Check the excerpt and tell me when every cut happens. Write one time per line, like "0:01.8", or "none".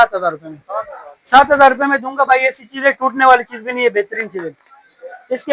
none